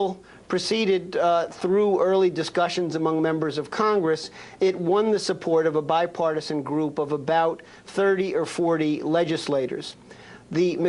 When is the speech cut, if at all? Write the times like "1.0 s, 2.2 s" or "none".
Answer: 4.4 s